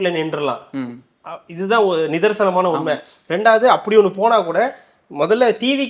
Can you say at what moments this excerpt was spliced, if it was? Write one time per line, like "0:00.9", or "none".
none